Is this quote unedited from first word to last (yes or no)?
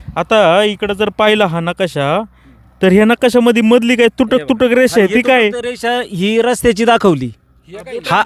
yes